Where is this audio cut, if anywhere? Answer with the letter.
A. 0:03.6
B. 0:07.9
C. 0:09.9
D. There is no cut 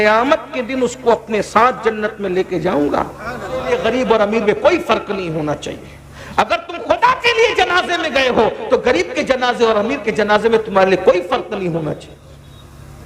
A